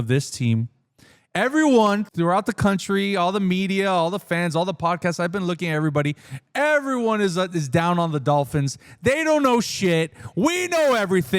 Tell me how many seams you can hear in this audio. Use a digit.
1